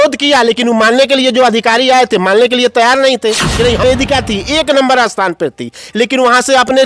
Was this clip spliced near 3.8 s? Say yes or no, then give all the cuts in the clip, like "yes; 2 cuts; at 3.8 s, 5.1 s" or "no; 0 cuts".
yes; 1 cut; at 3.8 s